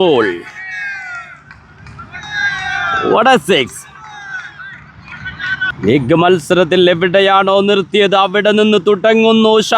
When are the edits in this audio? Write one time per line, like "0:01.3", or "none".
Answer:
0:05.8